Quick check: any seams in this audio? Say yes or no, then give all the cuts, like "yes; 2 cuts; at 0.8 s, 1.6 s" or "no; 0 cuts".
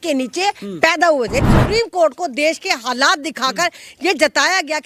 yes; 1 cut; at 1.5 s